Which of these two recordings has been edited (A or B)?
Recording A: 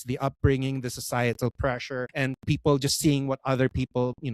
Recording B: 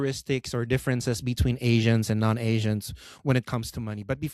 A